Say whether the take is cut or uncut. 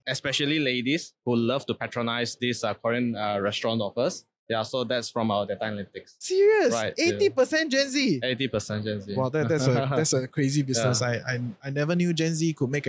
uncut